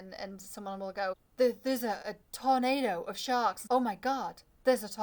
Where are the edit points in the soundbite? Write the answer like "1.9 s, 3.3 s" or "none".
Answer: 1.3 s, 3.6 s